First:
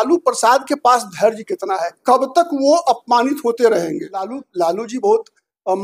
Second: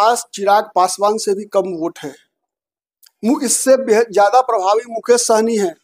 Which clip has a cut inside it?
first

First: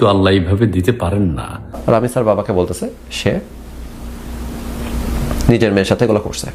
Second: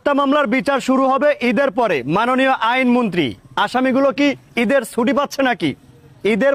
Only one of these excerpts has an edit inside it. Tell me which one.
first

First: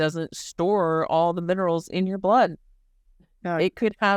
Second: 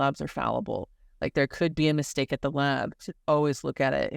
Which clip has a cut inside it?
second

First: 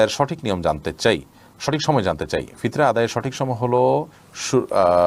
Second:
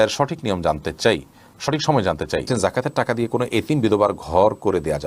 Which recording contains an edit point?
second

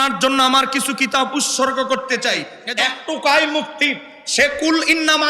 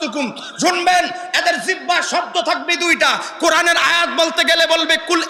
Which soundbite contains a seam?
first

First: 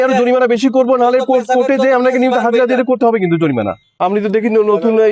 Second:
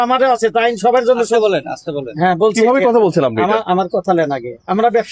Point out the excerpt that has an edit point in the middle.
first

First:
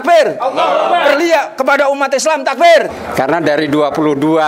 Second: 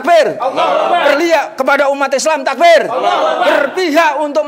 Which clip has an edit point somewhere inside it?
first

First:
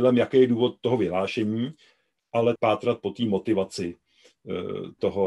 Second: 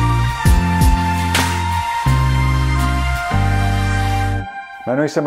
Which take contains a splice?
first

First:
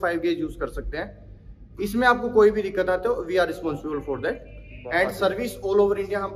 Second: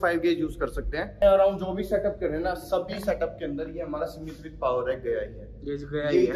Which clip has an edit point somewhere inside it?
second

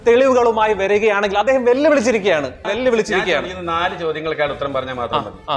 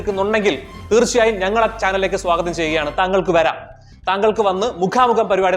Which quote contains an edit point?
first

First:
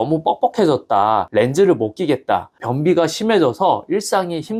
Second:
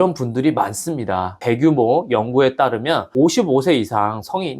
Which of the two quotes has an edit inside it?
second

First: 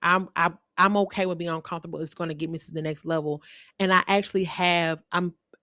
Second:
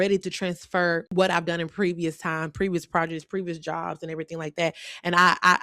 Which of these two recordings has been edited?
second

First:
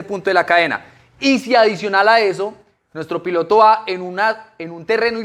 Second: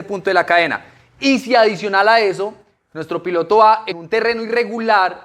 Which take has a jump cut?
second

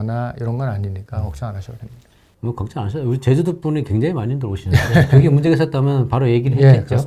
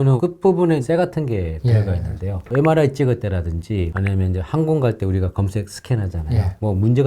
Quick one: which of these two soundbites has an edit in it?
second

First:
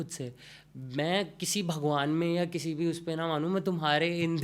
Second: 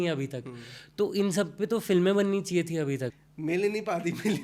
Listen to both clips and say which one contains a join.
second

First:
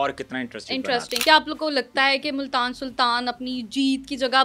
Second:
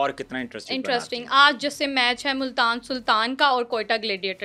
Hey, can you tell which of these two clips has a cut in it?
first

